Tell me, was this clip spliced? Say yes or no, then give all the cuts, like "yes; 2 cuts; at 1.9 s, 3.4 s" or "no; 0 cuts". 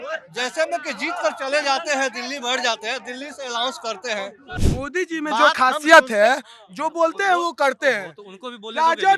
yes; 1 cut; at 4.5 s